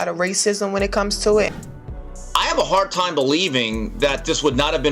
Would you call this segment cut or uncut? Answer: cut